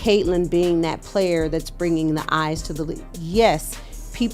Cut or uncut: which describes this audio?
uncut